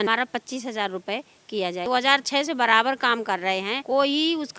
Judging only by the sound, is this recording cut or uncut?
cut